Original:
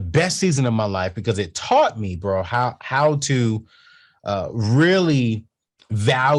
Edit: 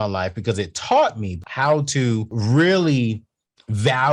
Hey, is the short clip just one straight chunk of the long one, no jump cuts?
no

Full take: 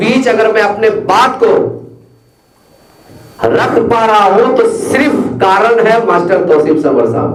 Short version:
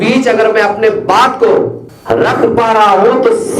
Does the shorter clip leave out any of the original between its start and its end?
yes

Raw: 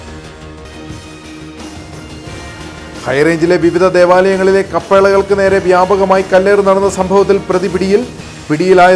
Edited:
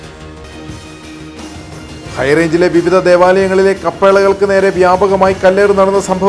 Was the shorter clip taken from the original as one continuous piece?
no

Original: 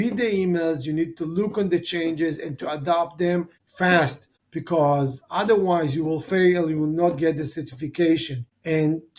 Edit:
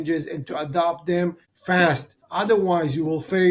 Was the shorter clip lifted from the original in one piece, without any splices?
no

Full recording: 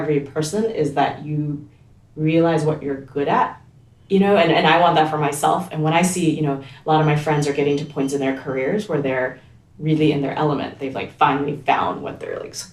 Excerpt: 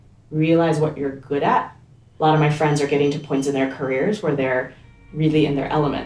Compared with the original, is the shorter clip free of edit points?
no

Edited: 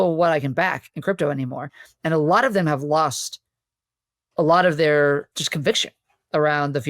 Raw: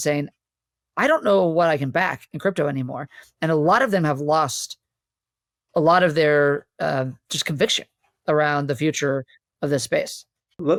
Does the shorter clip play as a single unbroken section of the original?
no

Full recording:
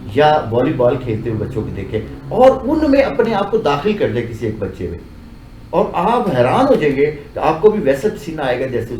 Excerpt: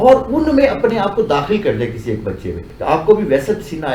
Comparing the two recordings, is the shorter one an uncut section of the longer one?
no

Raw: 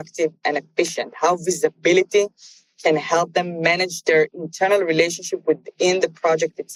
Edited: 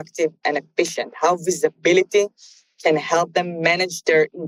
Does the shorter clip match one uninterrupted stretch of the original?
yes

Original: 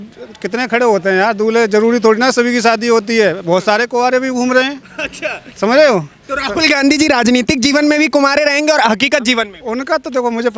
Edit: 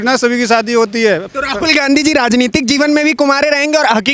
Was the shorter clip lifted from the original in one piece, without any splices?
no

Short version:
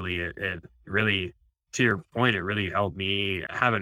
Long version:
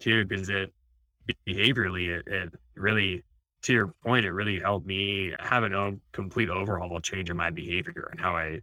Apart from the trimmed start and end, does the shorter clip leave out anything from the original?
no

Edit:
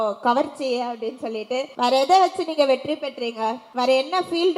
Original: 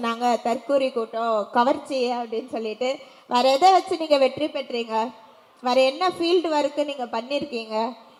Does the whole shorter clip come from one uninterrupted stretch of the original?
no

